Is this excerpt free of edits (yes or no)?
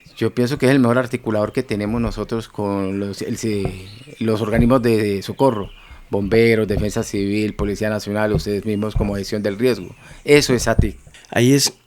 yes